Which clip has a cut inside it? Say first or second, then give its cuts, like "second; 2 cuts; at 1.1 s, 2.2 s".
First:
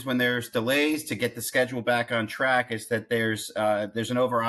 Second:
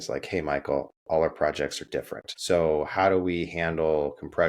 second; 1 cut; at 2.3 s